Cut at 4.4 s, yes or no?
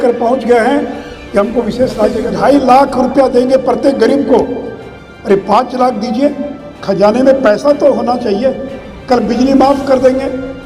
no